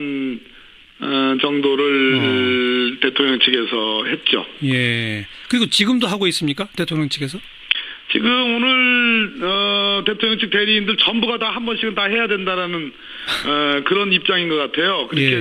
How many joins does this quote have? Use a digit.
1